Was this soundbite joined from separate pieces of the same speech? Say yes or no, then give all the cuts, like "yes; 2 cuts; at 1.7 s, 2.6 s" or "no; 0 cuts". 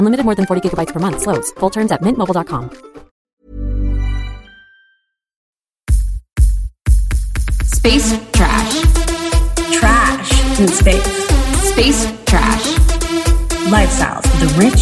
yes; 2 cuts; at 3.3 s, 5.5 s